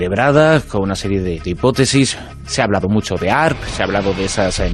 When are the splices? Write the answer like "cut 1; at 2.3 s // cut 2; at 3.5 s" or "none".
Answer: cut 1; at 1.4 s

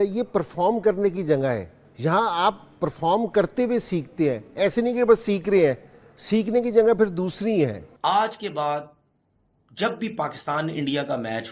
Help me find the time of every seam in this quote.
cut 1; at 1.8 s // cut 2; at 7.8 s

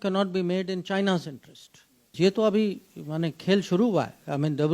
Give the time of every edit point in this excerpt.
cut 1; at 2.1 s

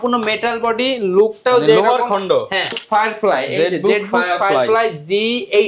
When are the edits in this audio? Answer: cut 1; at 2.8 s

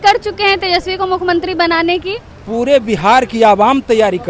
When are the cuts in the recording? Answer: none

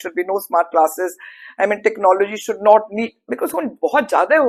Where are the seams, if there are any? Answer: none

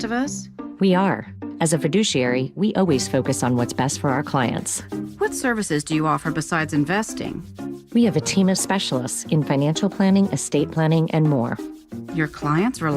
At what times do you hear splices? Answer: none

